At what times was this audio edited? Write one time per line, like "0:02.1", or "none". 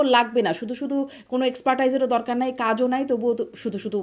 none

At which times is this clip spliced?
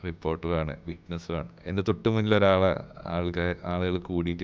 0:01.6

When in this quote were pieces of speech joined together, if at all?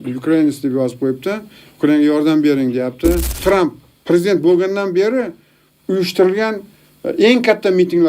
0:03.3

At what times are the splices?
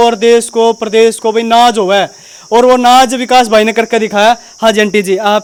none

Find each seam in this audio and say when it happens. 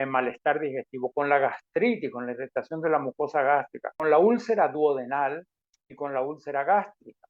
0:03.8

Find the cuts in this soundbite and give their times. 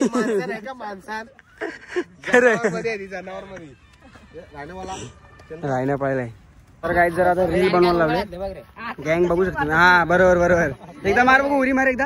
0:06.7

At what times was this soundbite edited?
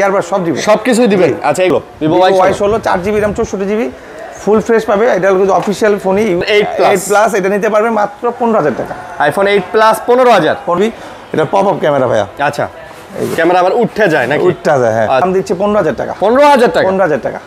0:01.7
0:06.4
0:10.8
0:15.2

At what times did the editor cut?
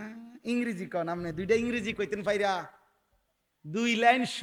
none

